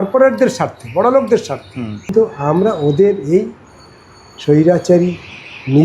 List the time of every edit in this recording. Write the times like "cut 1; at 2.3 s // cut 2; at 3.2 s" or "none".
cut 1; at 2.1 s